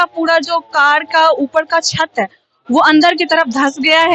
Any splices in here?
no; 0 cuts

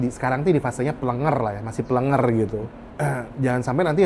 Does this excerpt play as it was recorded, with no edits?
no; 1 cut; at 2.8 s

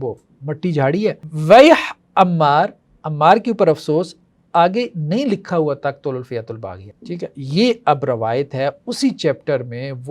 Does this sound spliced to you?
yes; 2 cuts; at 1.2 s, 6.8 s

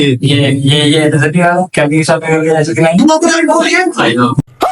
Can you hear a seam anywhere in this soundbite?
yes; 1 cut; at 3.0 s

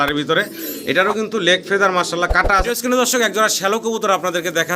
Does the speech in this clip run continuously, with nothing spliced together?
no; 1 cut; at 2.6 s

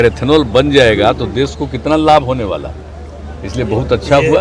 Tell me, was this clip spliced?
no; 0 cuts

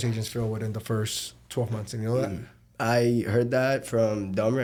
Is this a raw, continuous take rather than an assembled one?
yes; 0 cuts

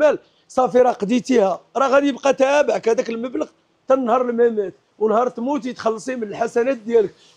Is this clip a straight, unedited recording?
yes; 0 cuts

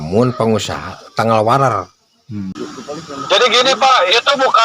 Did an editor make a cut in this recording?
yes; 1 cut; at 2.5 s

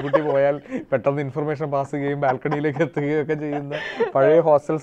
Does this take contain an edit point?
no; 0 cuts

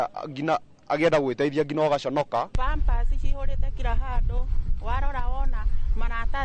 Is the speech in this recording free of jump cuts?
no; 1 cut; at 2.6 s

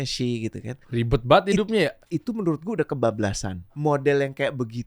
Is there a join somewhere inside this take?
yes; 3 cuts; at 0.8 s, 2.1 s, 3.6 s

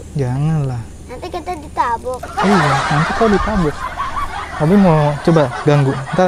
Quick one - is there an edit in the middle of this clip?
no; 0 cuts

